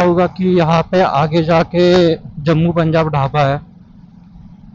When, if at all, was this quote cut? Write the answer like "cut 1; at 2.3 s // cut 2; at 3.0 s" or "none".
none